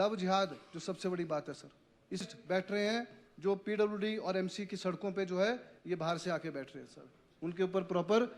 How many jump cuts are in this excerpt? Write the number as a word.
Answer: one